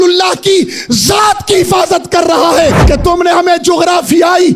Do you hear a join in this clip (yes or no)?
yes